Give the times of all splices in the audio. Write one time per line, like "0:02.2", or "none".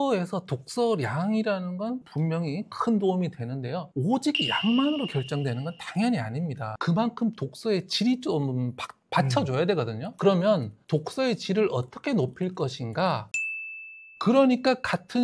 0:02.0
0:06.7
0:13.6